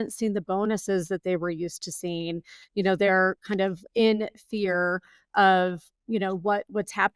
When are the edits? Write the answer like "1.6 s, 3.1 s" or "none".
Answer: none